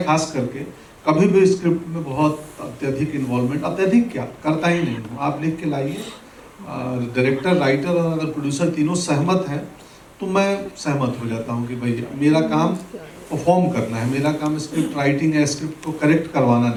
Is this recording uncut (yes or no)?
yes